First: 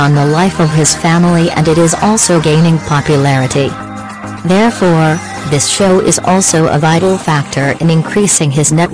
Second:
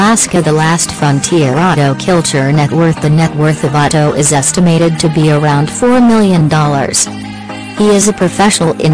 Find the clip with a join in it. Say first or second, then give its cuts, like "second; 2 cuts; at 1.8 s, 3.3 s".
first; 1 cut; at 3.4 s